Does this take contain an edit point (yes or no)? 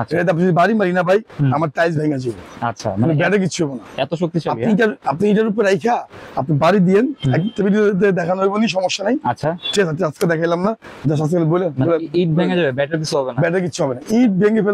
no